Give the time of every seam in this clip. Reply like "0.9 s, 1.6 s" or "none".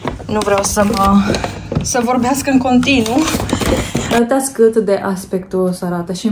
3.9 s